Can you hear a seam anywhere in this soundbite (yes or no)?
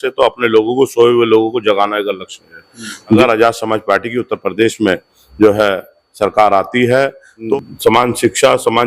yes